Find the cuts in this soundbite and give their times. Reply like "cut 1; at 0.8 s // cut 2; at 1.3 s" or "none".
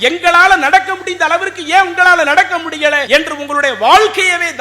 cut 1; at 3.0 s

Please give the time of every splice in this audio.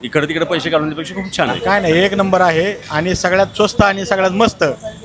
cut 1; at 1.6 s

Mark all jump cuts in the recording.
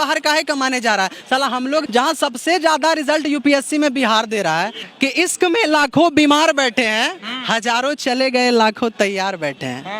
cut 1; at 1.9 s // cut 2; at 4.8 s

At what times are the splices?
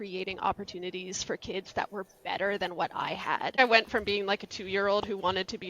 cut 1; at 3.5 s

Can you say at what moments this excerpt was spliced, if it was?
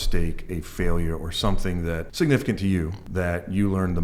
cut 1; at 2.1 s // cut 2; at 3.0 s

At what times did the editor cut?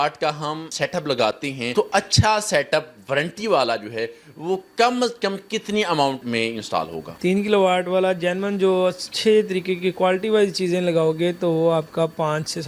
none

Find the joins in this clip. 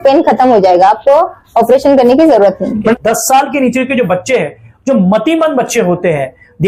cut 1; at 2.9 s

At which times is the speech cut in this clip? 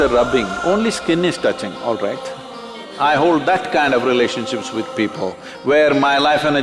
cut 1; at 2.9 s

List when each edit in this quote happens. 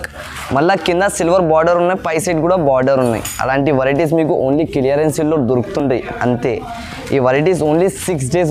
none

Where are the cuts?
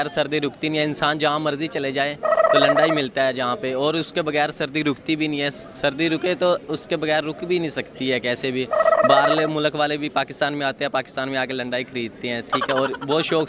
none

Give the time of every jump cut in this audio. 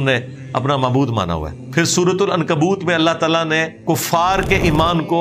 cut 1; at 1.6 s // cut 2; at 3.7 s

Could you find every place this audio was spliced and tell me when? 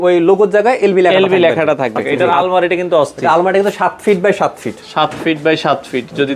cut 1; at 2.1 s

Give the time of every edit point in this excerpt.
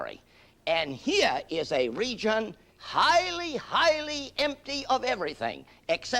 cut 1; at 1.6 s

